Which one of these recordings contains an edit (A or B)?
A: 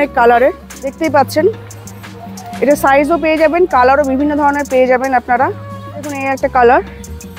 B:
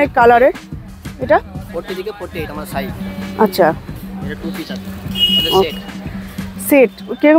A